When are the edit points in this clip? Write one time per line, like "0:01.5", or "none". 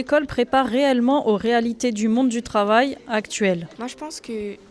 0:03.7